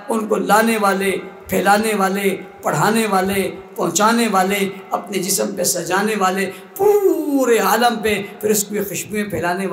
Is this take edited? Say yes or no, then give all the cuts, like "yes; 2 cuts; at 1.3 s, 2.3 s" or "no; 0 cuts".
no; 0 cuts